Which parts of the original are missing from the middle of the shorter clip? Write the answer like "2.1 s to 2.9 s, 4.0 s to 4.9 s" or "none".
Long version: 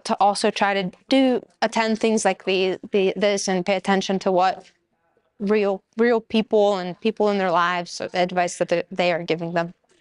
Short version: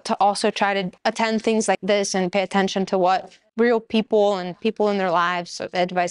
0.9 s to 1.5 s, 2.4 s to 3.2 s, 4.8 s to 5.8 s